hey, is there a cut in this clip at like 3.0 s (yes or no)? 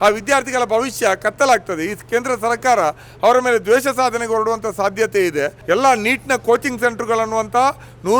no